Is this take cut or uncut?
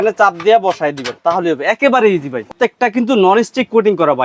cut